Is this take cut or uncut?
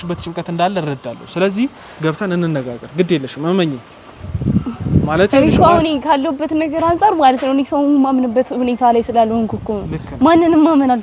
uncut